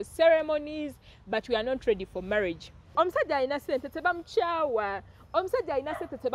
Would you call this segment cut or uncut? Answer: cut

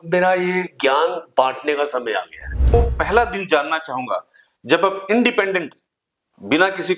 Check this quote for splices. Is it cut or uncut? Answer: cut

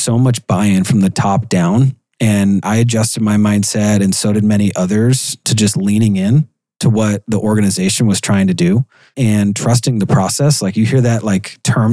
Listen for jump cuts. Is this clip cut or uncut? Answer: uncut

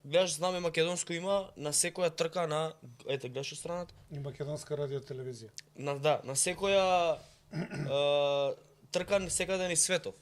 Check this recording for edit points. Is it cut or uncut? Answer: uncut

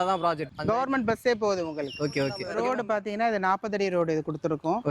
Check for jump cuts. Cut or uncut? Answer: cut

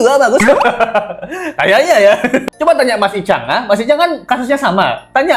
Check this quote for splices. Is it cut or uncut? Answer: uncut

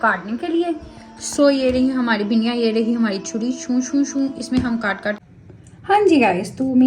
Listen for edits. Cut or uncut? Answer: cut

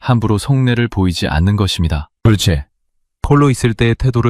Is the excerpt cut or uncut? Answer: cut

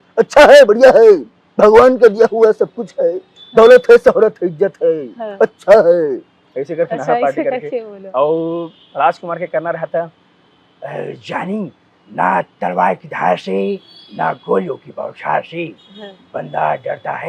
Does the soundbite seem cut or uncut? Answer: uncut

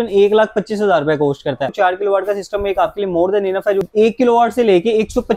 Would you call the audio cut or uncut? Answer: cut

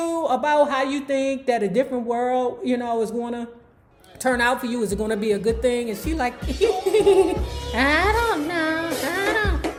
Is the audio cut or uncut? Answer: uncut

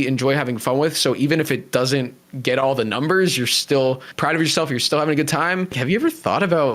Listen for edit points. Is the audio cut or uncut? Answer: cut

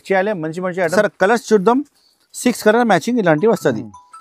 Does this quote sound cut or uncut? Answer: cut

